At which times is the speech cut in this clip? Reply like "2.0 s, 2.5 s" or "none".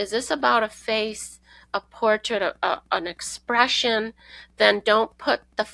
none